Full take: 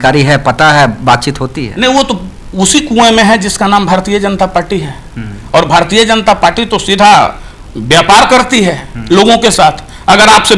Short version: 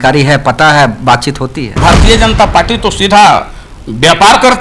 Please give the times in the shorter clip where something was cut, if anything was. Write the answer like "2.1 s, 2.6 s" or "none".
1.8 s

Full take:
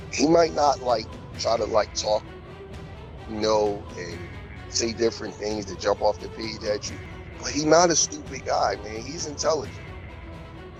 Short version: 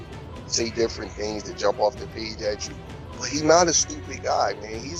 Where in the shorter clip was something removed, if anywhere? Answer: none

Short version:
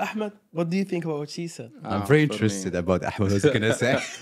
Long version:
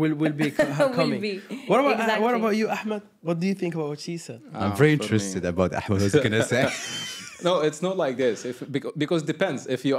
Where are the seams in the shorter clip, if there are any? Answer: none

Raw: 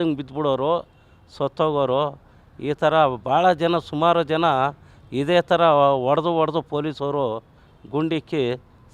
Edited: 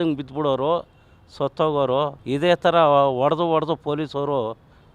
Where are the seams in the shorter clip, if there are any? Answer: 2.2 s

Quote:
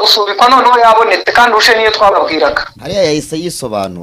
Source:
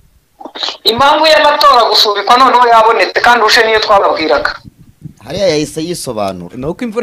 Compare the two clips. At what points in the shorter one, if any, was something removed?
2.7 s

